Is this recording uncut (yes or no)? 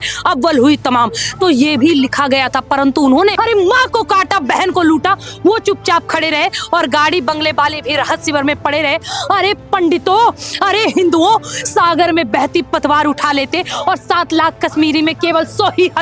no